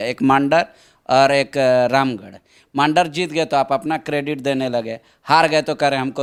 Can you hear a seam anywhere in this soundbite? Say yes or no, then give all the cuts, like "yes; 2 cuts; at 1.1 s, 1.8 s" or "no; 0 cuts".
no; 0 cuts